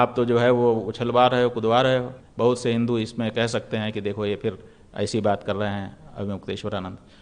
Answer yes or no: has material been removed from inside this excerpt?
yes